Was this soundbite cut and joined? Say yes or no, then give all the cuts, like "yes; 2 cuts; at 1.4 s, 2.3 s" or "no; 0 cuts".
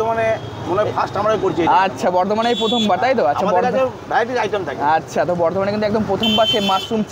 no; 0 cuts